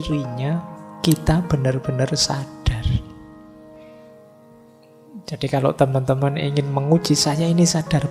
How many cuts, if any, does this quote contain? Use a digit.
0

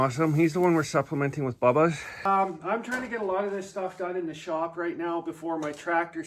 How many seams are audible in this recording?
1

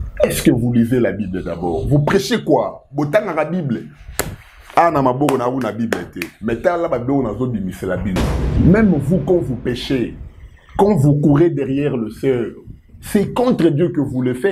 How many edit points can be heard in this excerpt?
1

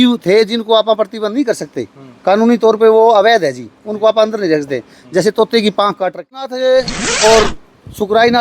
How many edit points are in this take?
1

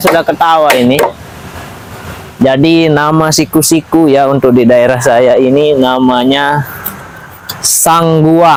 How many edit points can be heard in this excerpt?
0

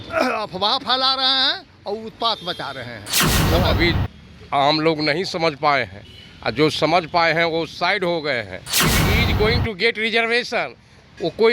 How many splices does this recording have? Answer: 2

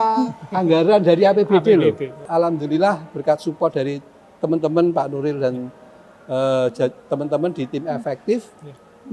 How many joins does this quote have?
1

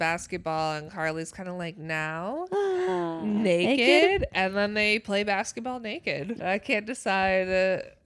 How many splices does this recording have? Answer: 1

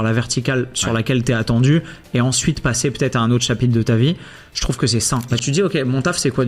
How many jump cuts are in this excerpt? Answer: 1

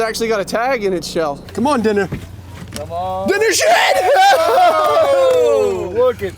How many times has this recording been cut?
1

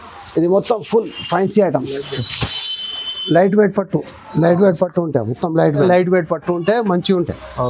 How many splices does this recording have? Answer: 1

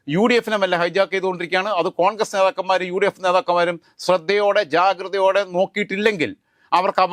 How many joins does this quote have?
0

